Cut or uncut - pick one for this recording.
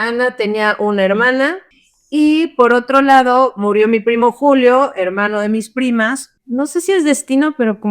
cut